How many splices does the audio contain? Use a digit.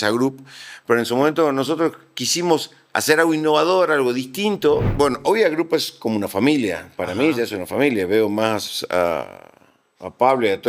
1